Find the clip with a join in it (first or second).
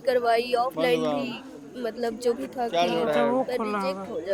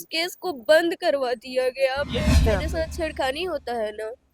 second